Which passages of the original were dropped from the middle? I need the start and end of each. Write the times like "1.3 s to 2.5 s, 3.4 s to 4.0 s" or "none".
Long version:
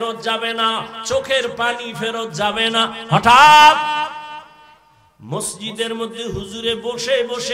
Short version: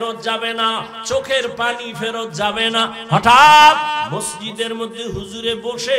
4.1 s to 5.3 s